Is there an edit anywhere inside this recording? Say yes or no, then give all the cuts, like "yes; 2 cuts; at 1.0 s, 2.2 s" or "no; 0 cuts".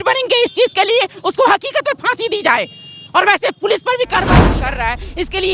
yes; 1 cut; at 4.4 s